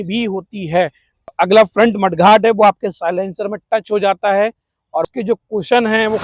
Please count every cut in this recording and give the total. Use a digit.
2